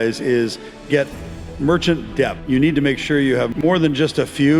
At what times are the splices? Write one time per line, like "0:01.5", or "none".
0:02.4
0:03.5